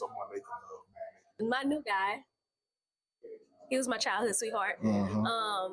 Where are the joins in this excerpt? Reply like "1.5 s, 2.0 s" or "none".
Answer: 1.3 s

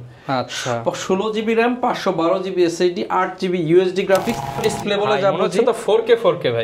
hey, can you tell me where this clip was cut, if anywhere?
4.6 s

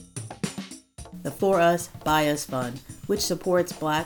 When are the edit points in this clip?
0.9 s

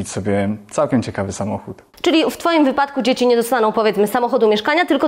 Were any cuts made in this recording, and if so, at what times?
1.8 s

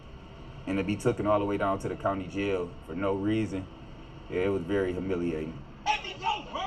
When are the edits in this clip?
5.6 s

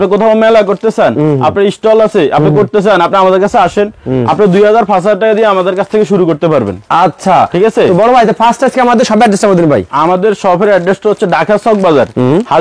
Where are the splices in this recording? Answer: none

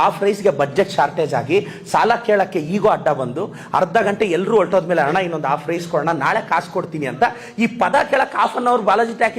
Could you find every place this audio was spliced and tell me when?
none

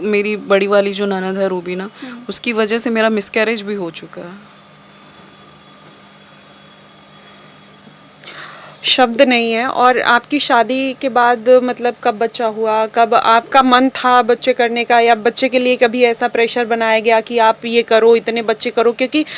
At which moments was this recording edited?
none

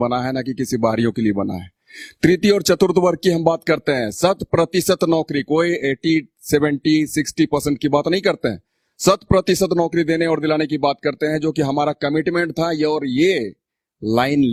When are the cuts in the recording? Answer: none

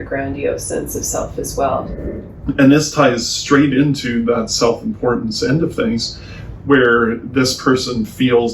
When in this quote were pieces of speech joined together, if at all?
1.9 s

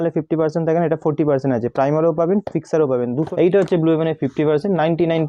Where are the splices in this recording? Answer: 3.3 s

